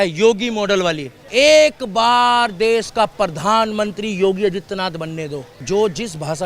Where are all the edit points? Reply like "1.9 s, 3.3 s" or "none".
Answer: 1.2 s, 5.5 s